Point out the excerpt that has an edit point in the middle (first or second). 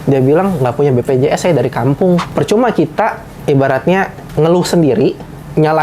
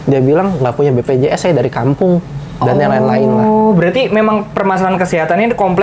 first